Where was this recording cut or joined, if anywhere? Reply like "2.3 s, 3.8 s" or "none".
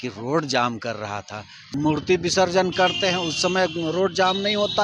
1.7 s